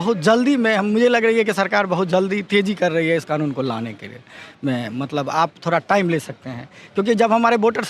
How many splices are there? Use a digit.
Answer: 0